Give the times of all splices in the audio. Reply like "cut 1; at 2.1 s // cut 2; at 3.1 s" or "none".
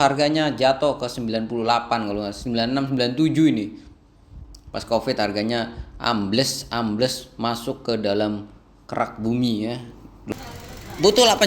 cut 1; at 10.3 s